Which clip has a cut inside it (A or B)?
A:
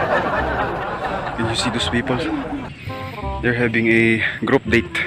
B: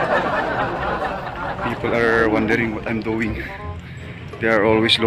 A